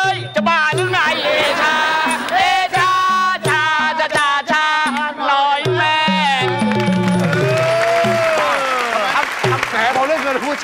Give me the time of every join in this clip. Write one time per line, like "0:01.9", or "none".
0:09.7

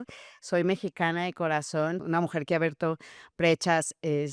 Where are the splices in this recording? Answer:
0:02.0

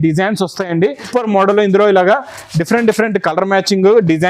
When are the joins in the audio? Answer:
0:01.0

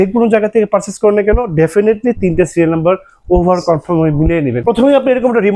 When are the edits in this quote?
0:04.6

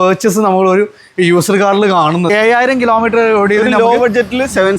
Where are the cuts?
0:02.3

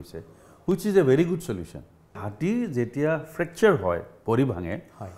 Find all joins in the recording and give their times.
0:02.2

